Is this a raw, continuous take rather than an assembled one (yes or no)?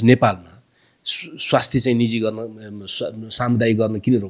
yes